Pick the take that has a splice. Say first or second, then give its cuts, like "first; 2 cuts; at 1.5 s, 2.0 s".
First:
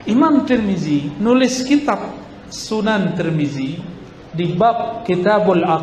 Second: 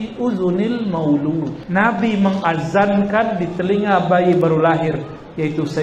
second; 1 cut; at 1.6 s